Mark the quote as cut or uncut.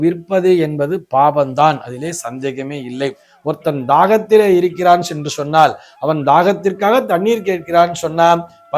cut